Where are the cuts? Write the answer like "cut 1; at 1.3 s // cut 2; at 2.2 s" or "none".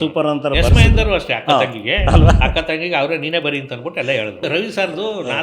cut 1; at 4.4 s